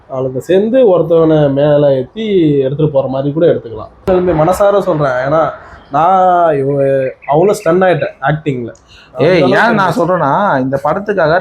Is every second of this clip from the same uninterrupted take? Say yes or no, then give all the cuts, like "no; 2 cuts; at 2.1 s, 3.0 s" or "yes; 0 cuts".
no; 1 cut; at 4.0 s